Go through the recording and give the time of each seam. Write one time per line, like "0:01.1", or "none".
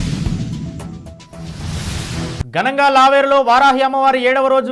none